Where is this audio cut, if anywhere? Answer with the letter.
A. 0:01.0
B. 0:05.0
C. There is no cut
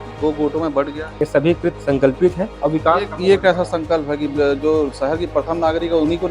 A